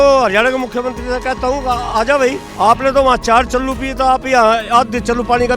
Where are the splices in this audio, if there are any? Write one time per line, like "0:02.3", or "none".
0:02.5